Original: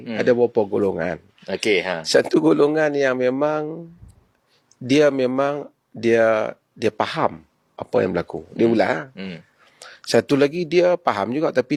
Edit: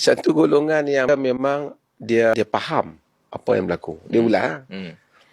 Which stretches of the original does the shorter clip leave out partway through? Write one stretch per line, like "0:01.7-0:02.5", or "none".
0:03.2-0:05.0
0:06.3-0:06.8